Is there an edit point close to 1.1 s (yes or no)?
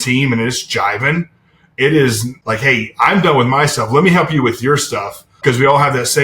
no